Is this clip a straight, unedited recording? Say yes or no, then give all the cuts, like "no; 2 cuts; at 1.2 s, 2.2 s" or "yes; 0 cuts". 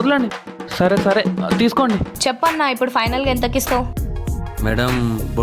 no; 1 cut; at 2.1 s